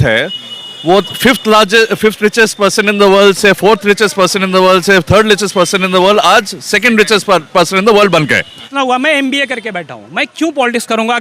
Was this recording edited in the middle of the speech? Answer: yes; 1 cut; at 8.6 s

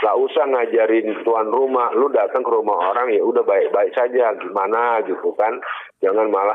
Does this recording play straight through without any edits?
yes; 0 cuts

